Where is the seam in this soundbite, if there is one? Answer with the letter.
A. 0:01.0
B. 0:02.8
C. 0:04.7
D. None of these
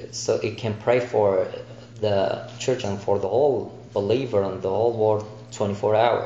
B